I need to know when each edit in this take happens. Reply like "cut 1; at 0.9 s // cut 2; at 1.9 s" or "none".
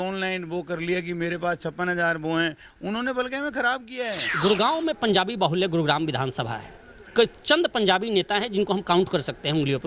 cut 1; at 4.3 s